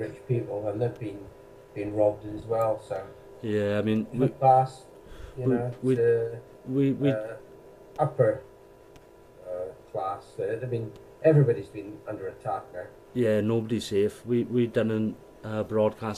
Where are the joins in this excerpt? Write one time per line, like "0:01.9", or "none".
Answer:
none